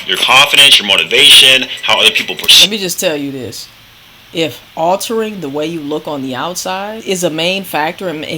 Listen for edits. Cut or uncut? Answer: cut